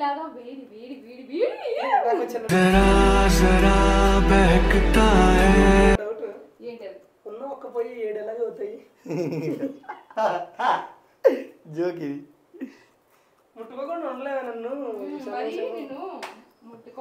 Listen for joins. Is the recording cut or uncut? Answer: uncut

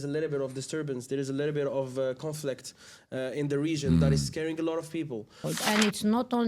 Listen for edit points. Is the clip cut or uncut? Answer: cut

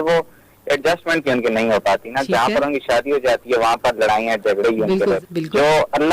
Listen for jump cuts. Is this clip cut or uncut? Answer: cut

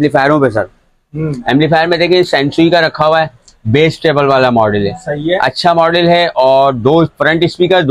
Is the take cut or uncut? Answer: uncut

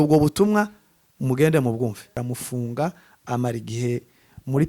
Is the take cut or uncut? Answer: cut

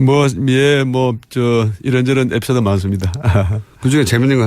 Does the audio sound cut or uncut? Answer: uncut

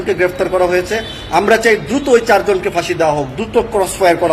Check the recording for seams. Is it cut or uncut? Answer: uncut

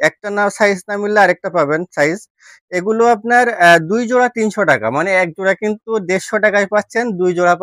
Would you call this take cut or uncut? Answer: uncut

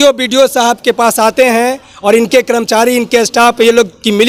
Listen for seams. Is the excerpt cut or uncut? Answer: uncut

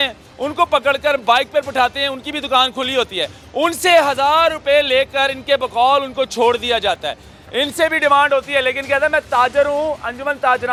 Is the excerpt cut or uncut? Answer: uncut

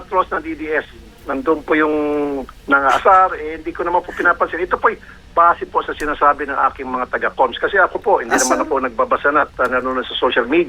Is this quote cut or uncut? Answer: uncut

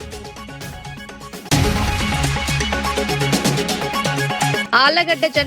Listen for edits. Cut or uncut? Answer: cut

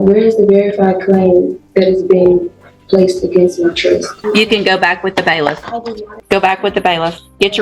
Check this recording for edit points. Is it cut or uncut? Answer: cut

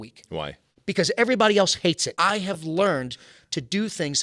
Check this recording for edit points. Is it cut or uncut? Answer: cut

